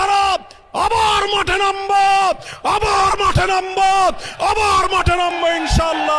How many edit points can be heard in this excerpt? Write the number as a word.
zero